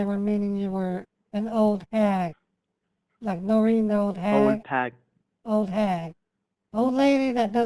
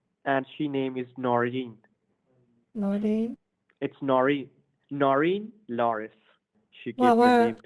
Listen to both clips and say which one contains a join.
second; 1 cut; at 6.6 s

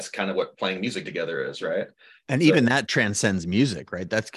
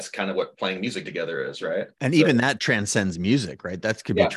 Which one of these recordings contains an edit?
second; 1 cut; at 1.9 s

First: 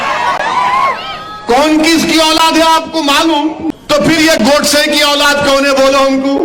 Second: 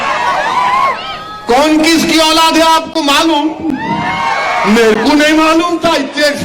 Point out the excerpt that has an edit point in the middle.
first; 1 cut; at 3.7 s

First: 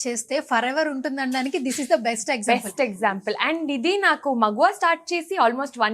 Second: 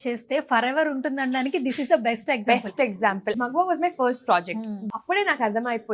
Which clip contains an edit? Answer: second; 2 cuts; at 3.3 s, 4.9 s

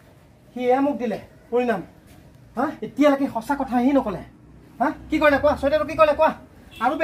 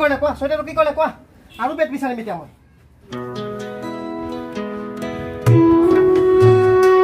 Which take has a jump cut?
second; 1 cut; at 3.0 s

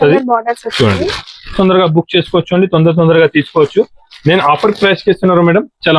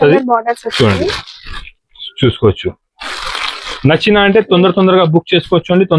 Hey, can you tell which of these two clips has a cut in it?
first; 1 cut; at 1.5 s

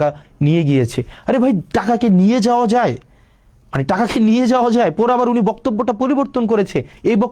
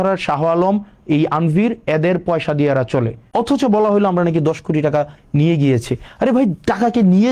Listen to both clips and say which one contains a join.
second; 1 cut; at 3.2 s

